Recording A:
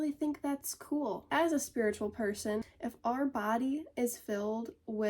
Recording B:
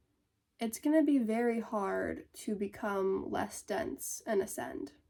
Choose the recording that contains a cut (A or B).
A